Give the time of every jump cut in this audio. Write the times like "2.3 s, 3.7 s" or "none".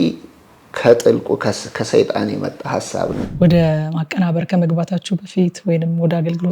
3.2 s